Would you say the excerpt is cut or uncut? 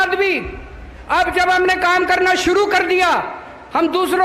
uncut